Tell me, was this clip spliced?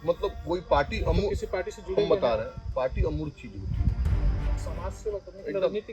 yes; 1 cut; at 4.5 s

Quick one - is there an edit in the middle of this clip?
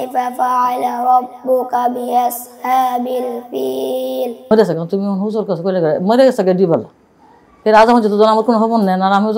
yes; 1 cut; at 4.5 s

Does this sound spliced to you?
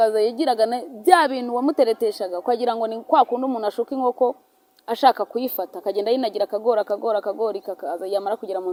no; 0 cuts

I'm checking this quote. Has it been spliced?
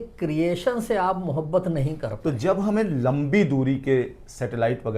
yes; 1 cut; at 2.1 s

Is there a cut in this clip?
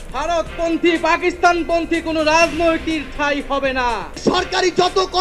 yes; 1 cut; at 4.2 s

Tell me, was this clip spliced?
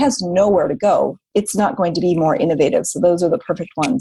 yes; 1 cut; at 1.2 s

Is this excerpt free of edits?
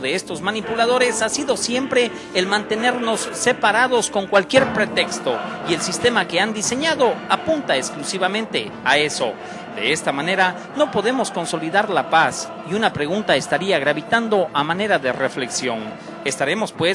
no; 1 cut; at 12.5 s

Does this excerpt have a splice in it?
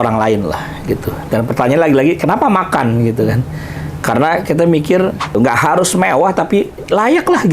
yes; 1 cut; at 5.3 s

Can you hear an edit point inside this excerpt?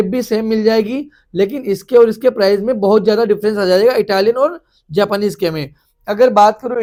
no; 0 cuts

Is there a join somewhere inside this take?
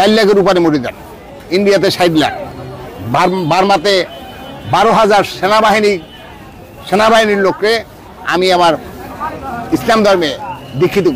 no; 0 cuts

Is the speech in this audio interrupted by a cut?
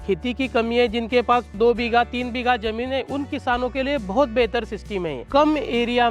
yes; 2 cuts; at 1.6 s, 5.2 s

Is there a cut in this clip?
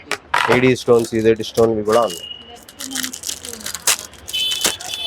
no; 0 cuts

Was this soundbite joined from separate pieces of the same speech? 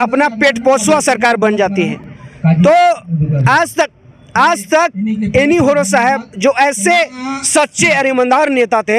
no; 0 cuts

